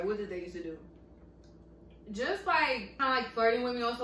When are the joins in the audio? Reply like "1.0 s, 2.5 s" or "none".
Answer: 2.9 s